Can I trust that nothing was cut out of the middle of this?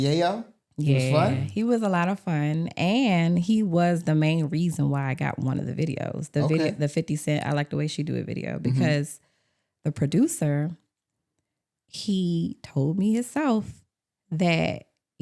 yes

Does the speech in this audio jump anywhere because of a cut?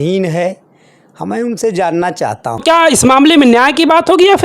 yes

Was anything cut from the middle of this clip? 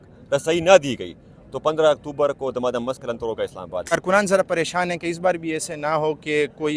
yes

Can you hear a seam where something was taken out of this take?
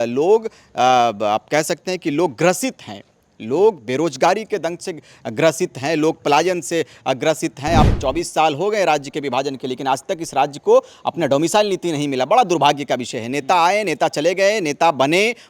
yes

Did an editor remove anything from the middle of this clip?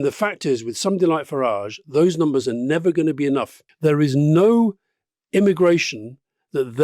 yes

